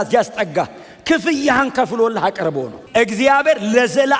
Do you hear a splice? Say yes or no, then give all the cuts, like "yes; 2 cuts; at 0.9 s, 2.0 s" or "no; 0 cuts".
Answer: yes; 1 cut; at 2.7 s